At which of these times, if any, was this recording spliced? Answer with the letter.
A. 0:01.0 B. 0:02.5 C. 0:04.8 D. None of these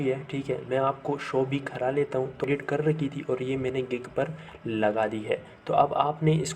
B